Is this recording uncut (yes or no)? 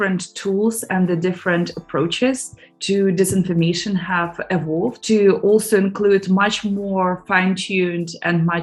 yes